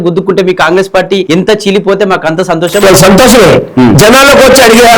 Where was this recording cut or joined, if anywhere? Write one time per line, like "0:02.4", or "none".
0:01.2
0:02.8